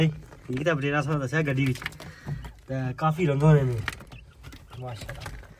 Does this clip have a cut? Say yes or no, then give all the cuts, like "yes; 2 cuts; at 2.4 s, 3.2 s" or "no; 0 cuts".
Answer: no; 0 cuts